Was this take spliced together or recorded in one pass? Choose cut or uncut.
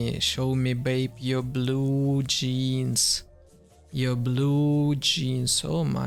uncut